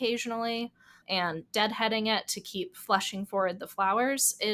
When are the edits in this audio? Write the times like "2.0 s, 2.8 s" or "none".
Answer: none

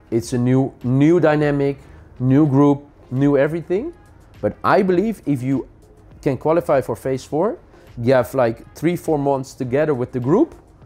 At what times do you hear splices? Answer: none

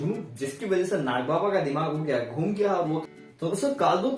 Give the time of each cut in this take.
3.0 s

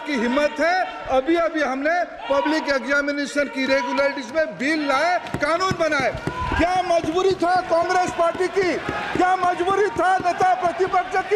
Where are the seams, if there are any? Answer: none

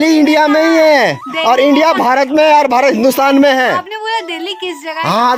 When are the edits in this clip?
none

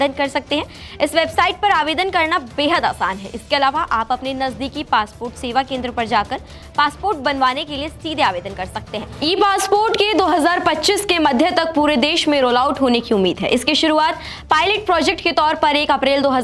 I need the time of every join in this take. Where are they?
9.1 s

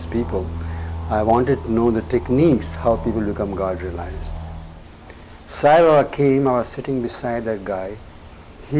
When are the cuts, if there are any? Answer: 4.6 s

